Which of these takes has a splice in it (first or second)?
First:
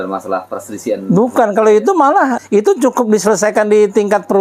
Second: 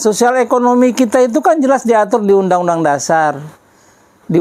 first